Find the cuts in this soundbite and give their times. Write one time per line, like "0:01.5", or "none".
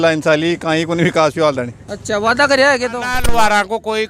0:03.2